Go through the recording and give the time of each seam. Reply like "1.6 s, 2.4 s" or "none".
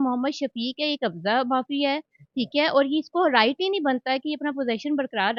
none